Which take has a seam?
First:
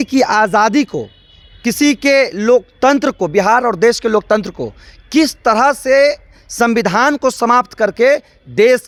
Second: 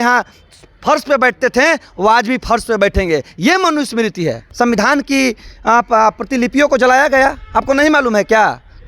second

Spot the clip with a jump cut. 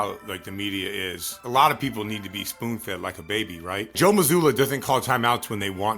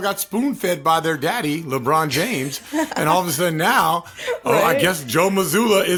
first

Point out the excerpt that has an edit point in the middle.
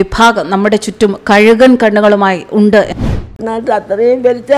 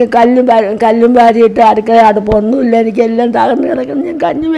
first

